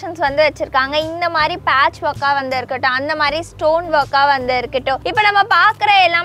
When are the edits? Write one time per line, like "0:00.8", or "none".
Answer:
0:05.0